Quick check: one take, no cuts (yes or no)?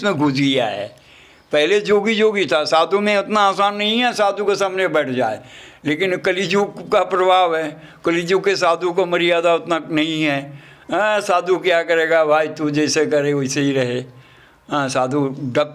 yes